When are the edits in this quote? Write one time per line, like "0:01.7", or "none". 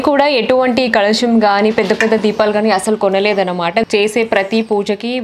0:03.9